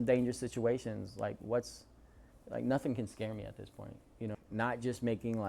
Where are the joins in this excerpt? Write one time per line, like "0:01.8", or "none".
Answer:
0:04.4